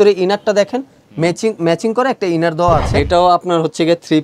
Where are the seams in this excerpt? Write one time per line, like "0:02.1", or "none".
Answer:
0:02.9